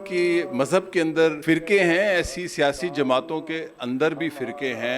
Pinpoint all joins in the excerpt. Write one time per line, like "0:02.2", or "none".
0:01.4